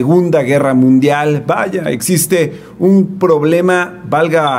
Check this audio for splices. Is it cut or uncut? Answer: uncut